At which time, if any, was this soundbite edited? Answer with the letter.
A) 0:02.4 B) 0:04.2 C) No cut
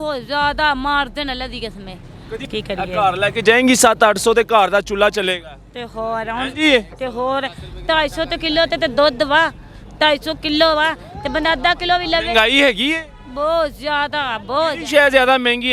A